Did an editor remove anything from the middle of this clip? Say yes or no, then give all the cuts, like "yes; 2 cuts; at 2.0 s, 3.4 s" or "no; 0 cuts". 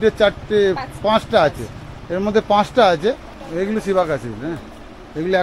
yes; 1 cut; at 3.4 s